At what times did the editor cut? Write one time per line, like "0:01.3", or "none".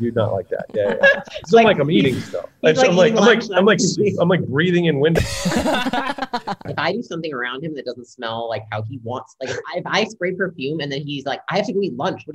0:06.7